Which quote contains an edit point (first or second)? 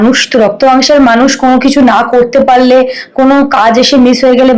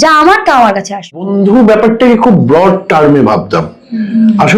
second